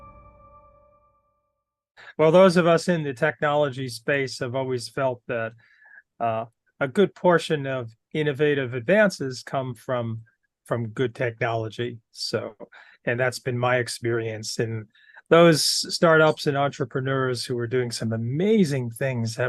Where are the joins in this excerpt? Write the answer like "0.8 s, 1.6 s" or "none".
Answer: 2.0 s